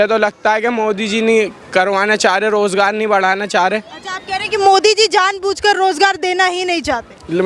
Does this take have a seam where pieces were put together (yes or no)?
no